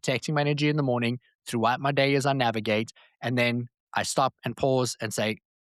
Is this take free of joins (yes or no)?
yes